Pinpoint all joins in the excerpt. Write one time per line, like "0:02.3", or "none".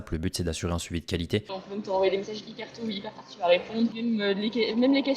0:01.6

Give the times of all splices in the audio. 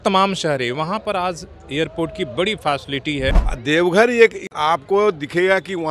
0:03.5
0:04.5

